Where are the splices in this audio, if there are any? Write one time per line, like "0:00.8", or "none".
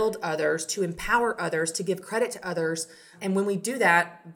0:03.1

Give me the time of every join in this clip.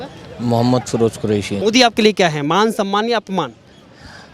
0:01.6

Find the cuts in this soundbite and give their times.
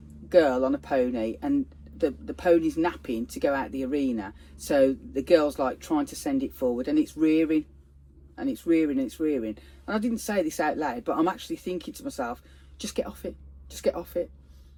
none

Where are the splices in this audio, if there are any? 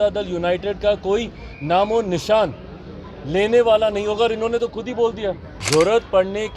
0:05.5

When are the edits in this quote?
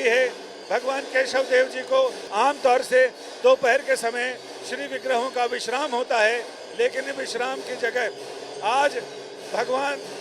0:02.2

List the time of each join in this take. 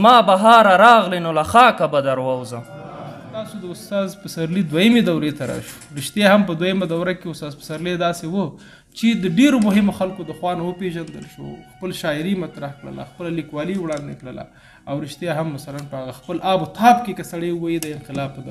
0:03.5

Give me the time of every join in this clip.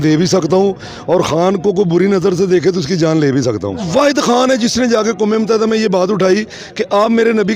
0:03.9

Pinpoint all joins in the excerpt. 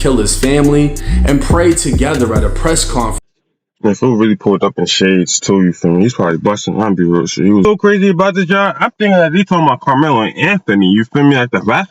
0:03.3
0:07.6

